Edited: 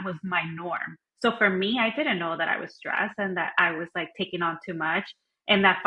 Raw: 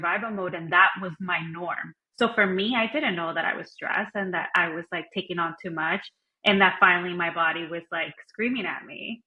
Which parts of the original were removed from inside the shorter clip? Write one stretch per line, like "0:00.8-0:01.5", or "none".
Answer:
none